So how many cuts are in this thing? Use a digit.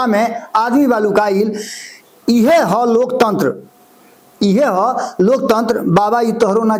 0